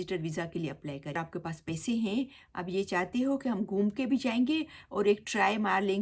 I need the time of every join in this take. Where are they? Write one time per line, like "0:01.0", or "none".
0:01.1